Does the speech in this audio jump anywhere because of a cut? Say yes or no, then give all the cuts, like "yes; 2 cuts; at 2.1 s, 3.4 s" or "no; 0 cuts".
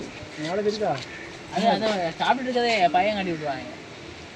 no; 0 cuts